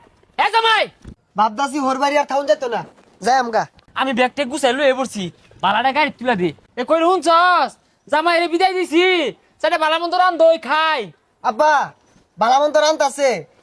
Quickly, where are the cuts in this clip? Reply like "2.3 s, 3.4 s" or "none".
1.1 s, 3.8 s, 6.6 s